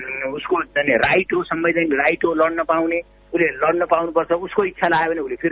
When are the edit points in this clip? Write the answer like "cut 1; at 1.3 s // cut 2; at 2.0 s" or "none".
none